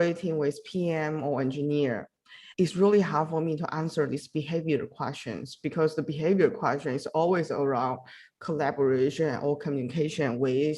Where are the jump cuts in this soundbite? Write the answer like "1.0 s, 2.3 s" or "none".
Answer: 2.4 s

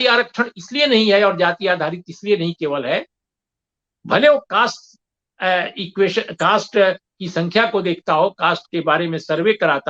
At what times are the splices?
none

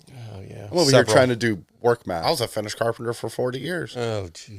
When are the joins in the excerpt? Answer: 2.1 s

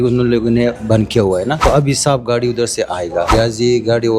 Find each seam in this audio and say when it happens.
1.6 s, 3.3 s

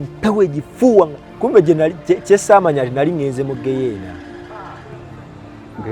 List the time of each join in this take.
1.2 s

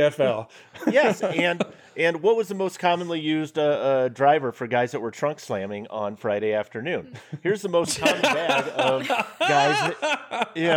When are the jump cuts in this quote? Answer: none

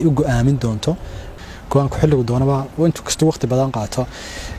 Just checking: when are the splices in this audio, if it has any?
1.3 s

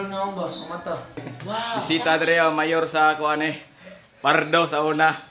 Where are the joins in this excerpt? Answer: 1.2 s

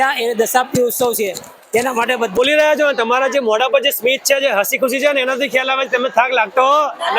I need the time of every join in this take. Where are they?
2.4 s

